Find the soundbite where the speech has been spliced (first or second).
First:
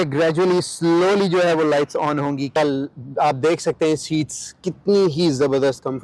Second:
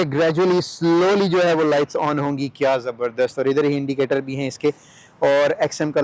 first